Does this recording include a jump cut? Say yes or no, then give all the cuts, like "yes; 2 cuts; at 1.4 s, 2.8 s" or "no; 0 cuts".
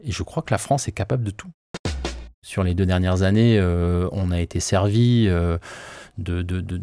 yes; 1 cut; at 2.0 s